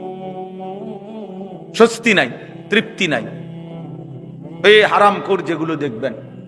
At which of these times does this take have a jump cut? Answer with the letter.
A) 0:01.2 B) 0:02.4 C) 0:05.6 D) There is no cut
A